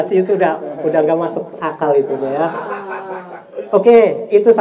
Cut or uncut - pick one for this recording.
uncut